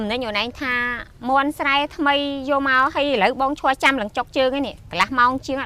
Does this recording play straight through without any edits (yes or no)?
yes